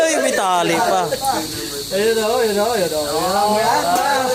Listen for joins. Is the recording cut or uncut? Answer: uncut